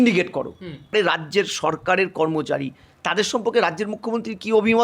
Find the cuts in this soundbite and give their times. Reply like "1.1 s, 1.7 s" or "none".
0.9 s